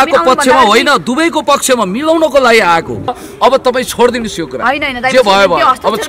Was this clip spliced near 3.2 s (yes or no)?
yes